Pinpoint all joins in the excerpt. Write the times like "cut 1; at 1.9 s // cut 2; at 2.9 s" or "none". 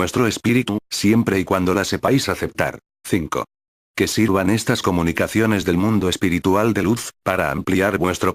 cut 1; at 6.6 s

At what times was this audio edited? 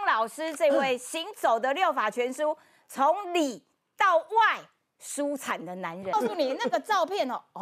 cut 1; at 6.1 s

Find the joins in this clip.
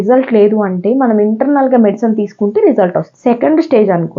cut 1; at 3.1 s

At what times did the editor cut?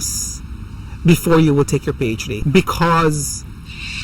cut 1; at 2.3 s

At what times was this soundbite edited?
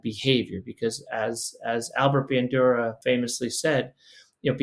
cut 1; at 3.0 s

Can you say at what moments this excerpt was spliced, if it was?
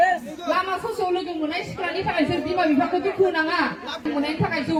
none

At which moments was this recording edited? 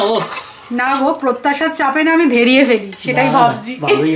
none

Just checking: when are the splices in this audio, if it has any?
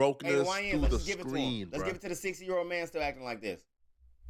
none

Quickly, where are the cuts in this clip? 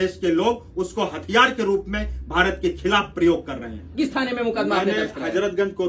cut 1; at 3.9 s

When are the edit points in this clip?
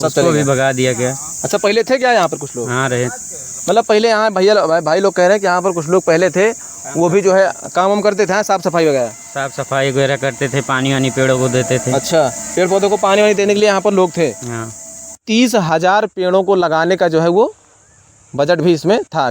cut 1; at 15.2 s

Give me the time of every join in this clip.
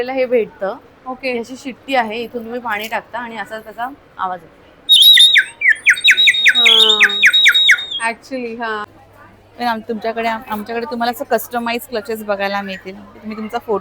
cut 1; at 8.9 s

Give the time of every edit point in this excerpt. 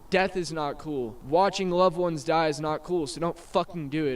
cut 1; at 1.2 s

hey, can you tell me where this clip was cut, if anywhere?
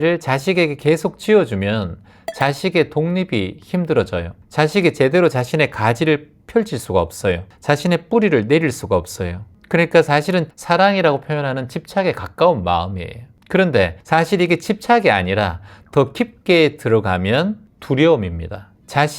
none

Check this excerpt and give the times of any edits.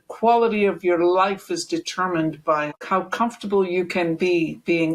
cut 1; at 2.7 s

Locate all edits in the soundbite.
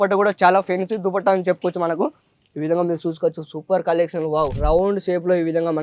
cut 1; at 4.6 s

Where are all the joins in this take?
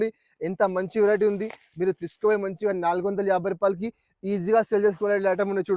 none

